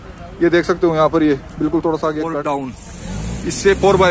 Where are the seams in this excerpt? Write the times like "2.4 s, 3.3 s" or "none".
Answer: 2.3 s